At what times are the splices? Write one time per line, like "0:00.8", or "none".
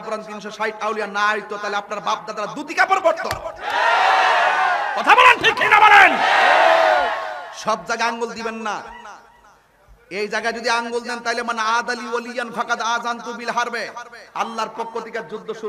none